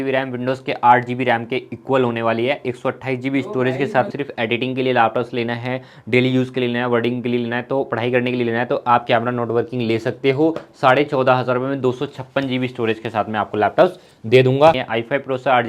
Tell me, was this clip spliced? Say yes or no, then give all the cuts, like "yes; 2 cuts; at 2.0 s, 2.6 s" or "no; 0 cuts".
yes; 2 cuts; at 4.1 s, 14.8 s